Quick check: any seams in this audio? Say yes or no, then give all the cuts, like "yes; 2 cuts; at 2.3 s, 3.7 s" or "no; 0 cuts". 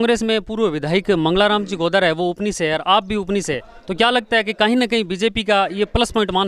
no; 0 cuts